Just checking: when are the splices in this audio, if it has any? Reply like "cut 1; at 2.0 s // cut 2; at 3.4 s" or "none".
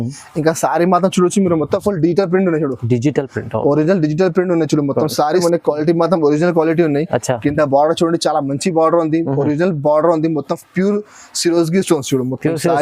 cut 1; at 5.4 s